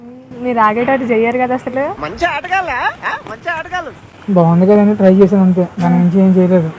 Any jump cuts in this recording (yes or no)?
no